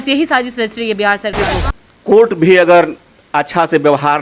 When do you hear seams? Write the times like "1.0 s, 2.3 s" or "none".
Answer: 1.4 s